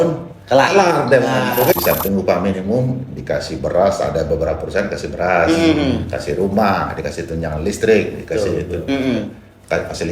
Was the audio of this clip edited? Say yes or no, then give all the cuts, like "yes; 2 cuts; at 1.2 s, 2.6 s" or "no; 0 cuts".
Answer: yes; 1 cut; at 1.7 s